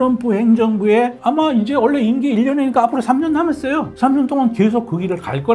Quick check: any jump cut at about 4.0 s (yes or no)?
no